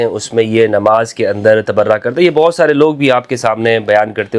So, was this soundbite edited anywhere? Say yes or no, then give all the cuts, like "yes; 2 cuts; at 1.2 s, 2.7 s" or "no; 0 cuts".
no; 0 cuts